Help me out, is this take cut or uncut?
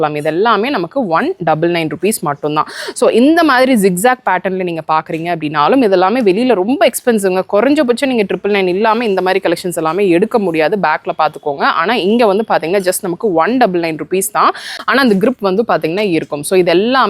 cut